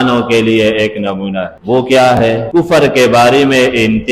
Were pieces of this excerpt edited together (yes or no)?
yes